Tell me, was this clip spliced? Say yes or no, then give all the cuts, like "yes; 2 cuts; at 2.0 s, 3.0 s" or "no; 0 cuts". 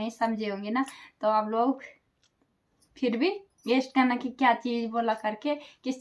no; 0 cuts